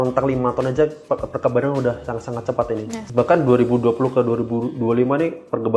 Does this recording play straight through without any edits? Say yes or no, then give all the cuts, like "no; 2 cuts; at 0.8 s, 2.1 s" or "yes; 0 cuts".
no; 1 cut; at 3.0 s